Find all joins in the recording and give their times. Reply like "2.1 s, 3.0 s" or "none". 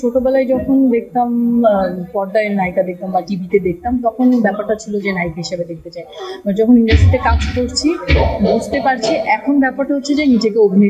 none

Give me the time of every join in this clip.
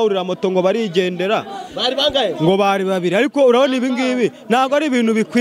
none

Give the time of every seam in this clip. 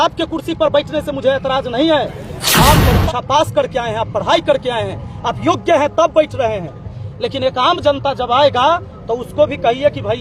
none

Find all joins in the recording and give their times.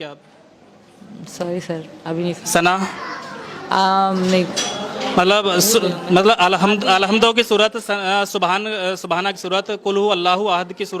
none

